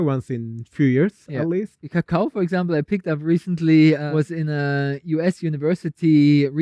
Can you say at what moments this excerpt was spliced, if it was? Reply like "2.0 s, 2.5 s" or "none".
1.9 s, 4.1 s